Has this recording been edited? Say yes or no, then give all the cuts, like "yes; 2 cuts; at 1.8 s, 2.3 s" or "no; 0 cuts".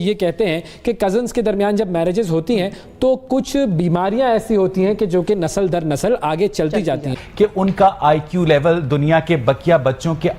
yes; 1 cut; at 7.2 s